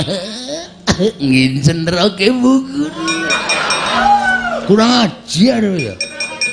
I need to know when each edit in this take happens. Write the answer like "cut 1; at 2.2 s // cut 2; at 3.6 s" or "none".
cut 1; at 3.9 s

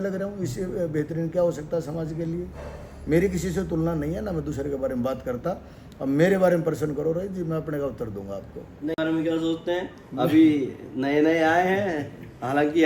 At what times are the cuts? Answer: cut 1; at 8.9 s

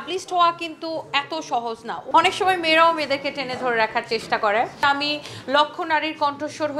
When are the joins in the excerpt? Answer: cut 1; at 2.0 s // cut 2; at 4.8 s

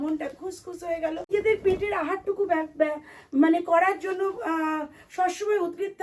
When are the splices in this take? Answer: cut 1; at 1.3 s

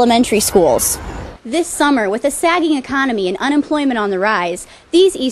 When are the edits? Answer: cut 1; at 1.4 s

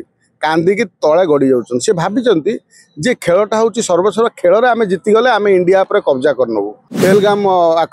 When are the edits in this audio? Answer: cut 1; at 6.8 s

